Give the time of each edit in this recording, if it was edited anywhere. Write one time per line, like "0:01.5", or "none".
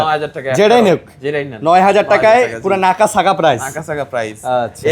none